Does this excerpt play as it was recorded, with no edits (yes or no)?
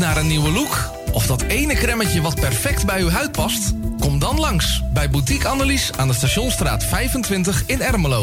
yes